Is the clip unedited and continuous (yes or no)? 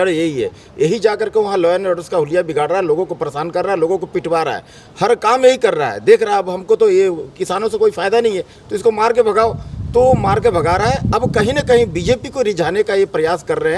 yes